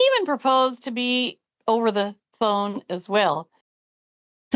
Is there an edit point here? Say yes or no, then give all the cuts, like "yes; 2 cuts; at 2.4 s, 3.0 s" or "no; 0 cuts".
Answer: yes; 1 cut; at 1.5 s